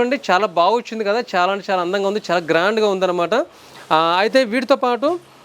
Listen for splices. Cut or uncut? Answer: uncut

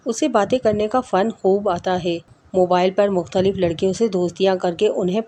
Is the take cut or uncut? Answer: uncut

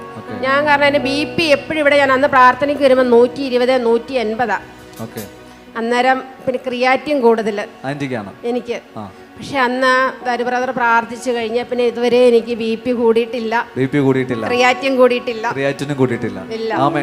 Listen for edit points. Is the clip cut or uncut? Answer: uncut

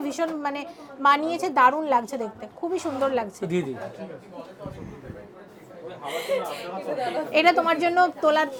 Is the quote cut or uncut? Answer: uncut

